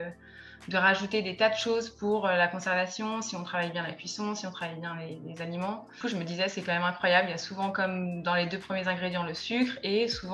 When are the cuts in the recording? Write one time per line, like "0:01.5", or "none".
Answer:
0:05.9

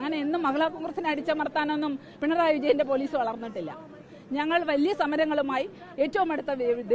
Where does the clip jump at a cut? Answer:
none

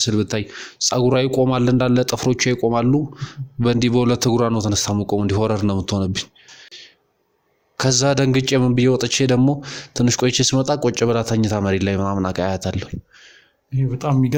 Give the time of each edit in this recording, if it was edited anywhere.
none

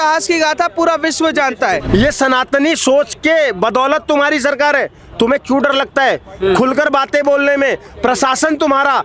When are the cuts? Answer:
0:01.8

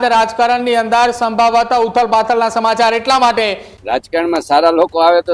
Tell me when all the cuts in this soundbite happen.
0:03.7

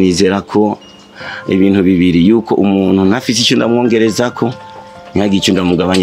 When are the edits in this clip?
none

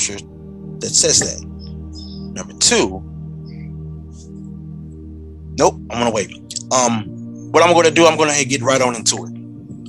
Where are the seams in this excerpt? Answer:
0:03.5
0:05.1

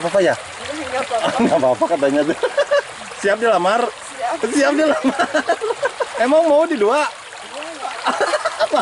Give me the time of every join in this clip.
0:06.0

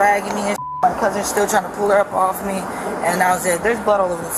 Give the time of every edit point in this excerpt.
none

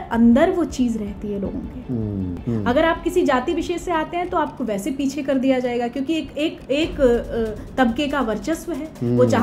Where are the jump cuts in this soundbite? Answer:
0:02.3

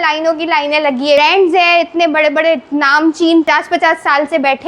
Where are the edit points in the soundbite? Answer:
0:01.2
0:03.5

